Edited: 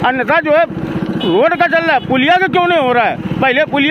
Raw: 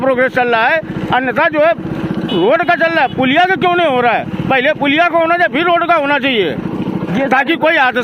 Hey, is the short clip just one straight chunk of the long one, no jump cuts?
yes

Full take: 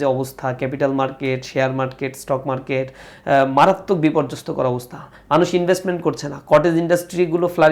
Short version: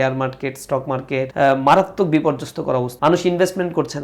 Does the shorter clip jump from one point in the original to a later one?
yes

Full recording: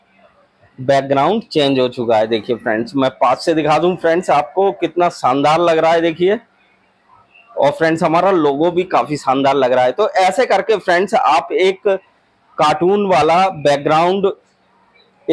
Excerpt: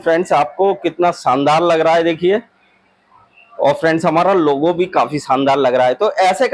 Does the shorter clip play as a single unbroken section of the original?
yes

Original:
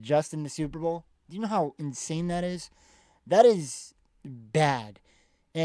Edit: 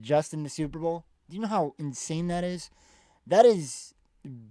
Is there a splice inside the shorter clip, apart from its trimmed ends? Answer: no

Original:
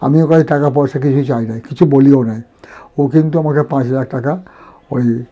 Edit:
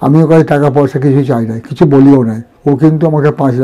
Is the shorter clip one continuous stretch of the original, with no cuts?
no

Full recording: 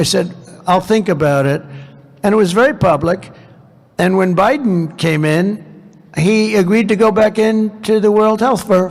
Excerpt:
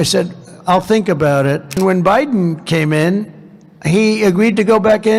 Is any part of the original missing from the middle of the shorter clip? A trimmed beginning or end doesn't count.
yes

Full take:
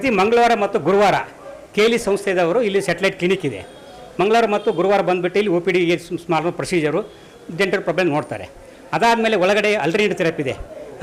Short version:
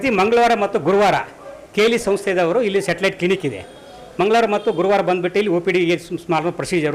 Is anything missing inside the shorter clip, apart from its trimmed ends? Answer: no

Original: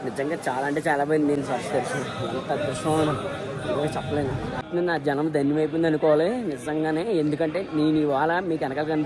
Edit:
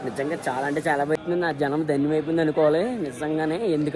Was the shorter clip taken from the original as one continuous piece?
no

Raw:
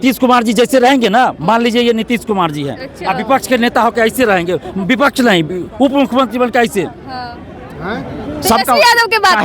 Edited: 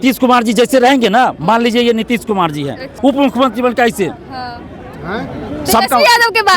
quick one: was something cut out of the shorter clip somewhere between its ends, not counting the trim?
yes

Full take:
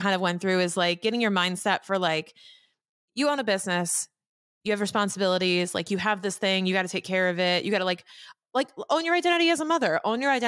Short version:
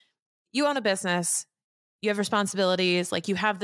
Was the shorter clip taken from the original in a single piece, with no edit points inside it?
yes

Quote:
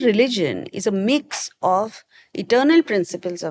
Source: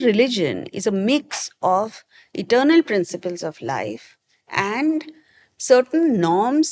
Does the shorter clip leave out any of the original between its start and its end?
no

